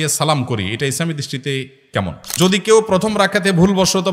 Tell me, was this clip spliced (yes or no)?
yes